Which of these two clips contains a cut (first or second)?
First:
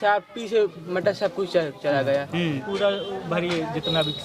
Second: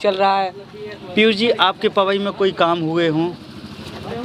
first